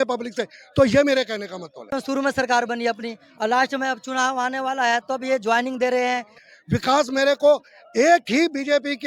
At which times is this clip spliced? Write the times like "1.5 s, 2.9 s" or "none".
2.0 s, 6.4 s